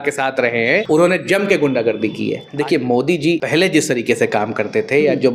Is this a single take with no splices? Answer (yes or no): no